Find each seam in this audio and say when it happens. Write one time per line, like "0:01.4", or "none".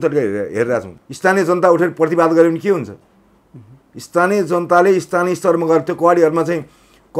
0:00.9